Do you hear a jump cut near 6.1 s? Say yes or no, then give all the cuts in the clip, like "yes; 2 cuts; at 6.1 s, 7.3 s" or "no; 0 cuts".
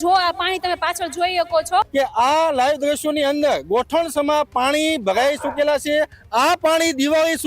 no; 1 cut; at 1.9 s